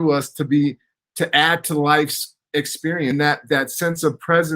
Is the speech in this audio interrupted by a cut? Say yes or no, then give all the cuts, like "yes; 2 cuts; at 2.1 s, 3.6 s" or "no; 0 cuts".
yes; 1 cut; at 3.1 s